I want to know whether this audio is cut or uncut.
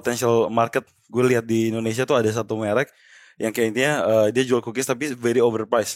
uncut